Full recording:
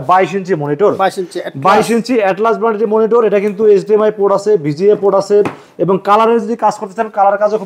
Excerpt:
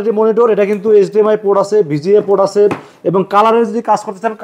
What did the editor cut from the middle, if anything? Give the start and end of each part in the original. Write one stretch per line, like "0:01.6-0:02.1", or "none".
none